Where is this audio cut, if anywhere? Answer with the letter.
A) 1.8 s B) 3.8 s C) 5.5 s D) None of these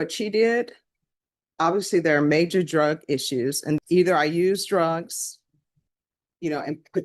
B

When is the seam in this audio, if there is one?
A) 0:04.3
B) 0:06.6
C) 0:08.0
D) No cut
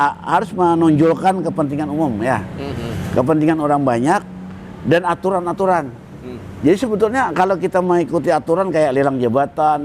D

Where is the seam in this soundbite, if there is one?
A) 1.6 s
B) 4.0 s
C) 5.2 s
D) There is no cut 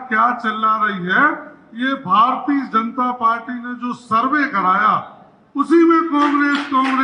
D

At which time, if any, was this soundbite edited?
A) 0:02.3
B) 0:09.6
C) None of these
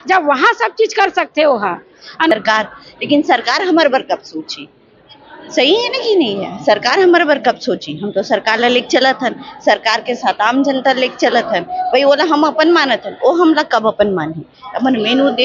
A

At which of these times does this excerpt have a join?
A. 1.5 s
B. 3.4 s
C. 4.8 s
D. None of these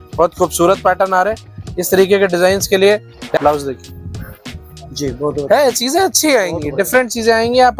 B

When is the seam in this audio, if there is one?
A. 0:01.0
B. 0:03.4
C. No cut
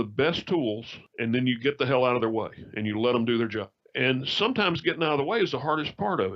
C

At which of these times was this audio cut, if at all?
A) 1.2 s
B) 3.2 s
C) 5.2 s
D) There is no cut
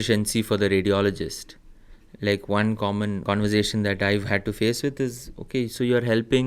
B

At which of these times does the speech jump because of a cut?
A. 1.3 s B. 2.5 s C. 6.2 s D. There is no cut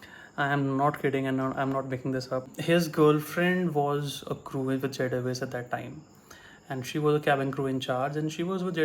B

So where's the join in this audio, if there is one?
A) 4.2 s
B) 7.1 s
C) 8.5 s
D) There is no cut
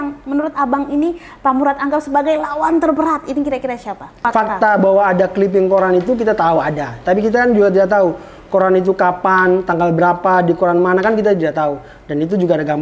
A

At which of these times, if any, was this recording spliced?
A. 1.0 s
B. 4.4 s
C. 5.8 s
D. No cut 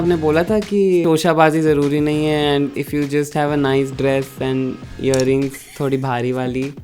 A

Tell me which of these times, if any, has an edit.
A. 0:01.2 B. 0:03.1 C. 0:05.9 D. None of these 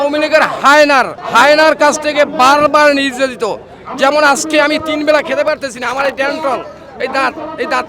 A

